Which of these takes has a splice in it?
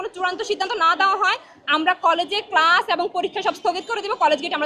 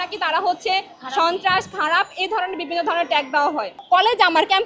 second; 1 cut; at 3.7 s

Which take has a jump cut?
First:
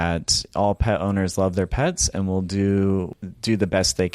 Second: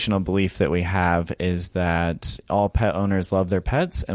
first; 1 cut; at 3.1 s

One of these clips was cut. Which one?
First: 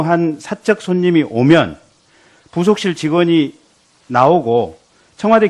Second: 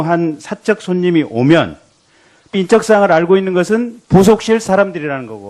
first; 1 cut; at 2.5 s

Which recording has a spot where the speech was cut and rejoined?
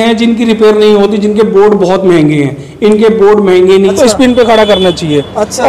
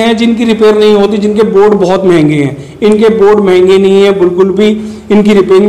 first; 1 cut; at 3.9 s

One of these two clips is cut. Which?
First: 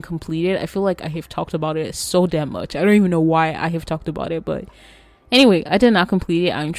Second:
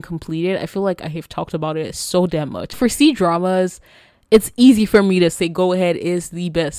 second; 2 cuts; at 2.8 s, 5.4 s

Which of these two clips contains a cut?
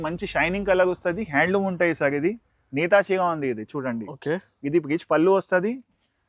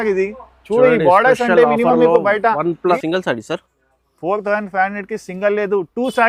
second; 1 cut; at 3.0 s

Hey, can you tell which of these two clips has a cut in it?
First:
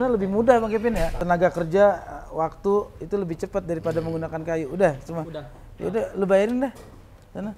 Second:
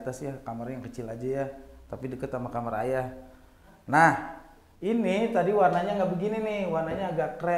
first; 1 cut; at 1.1 s

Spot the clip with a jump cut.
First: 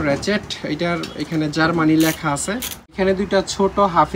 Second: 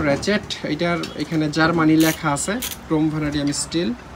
first; 1 cut; at 2.8 s

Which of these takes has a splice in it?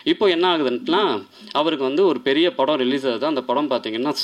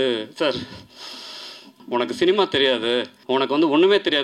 second; 2 cuts; at 1.8 s, 3.1 s

